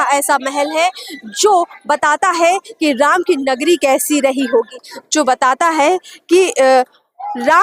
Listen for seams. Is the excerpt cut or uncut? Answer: uncut